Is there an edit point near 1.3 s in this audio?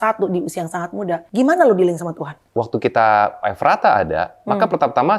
yes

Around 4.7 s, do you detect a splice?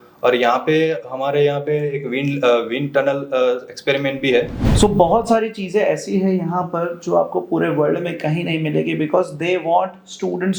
yes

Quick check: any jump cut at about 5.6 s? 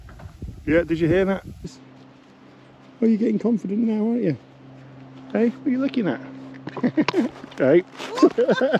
no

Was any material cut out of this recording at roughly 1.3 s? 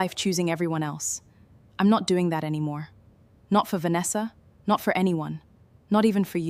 no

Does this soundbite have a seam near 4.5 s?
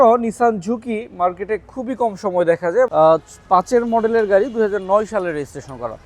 no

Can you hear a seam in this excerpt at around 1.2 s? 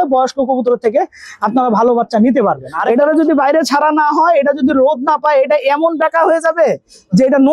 no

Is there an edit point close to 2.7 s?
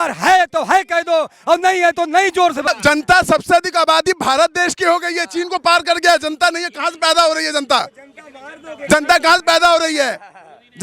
yes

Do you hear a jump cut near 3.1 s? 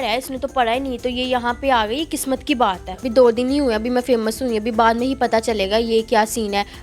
yes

